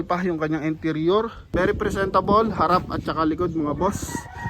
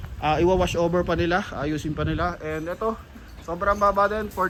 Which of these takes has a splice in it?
first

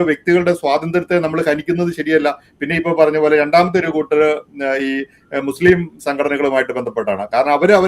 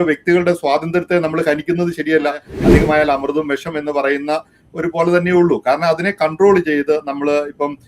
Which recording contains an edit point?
second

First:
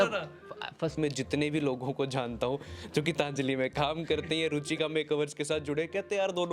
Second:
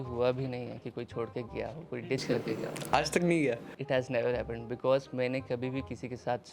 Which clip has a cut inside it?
first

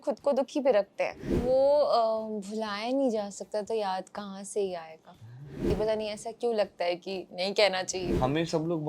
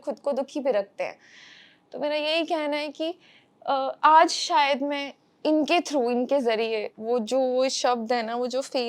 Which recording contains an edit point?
first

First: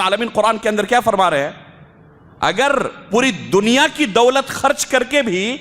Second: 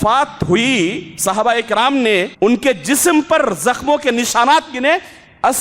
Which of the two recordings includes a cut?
second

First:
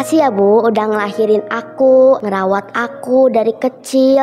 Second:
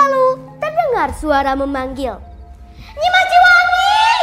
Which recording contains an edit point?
first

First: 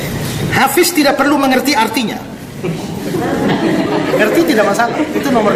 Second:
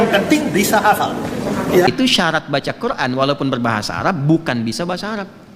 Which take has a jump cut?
second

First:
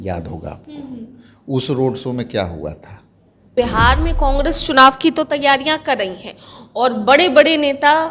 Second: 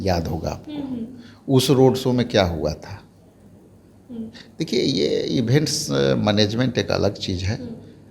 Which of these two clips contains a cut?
first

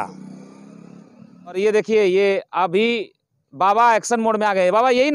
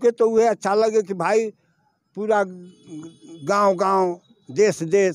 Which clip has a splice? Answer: first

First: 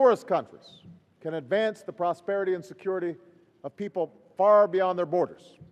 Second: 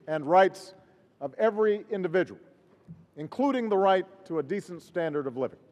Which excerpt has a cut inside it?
first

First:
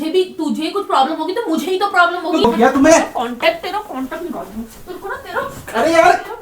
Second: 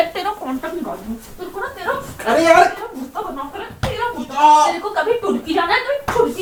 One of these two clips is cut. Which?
first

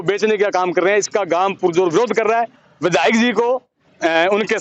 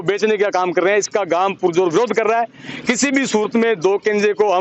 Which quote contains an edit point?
first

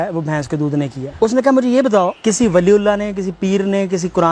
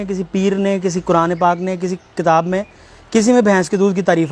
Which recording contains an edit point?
first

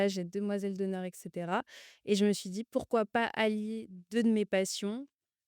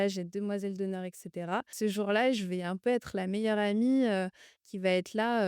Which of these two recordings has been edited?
second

